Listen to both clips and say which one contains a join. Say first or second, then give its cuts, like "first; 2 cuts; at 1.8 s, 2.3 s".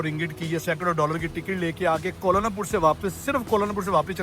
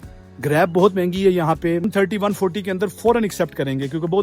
second; 1 cut; at 1.8 s